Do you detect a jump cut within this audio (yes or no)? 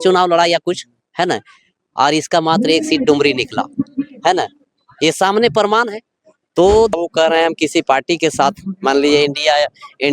yes